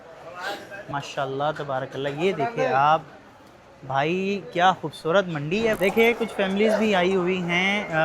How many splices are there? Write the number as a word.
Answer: two